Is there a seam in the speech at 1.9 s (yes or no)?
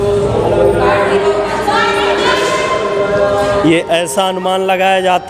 no